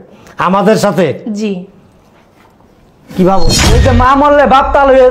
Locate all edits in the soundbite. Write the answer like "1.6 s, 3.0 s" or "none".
3.5 s